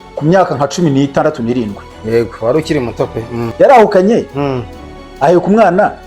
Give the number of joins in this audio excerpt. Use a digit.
1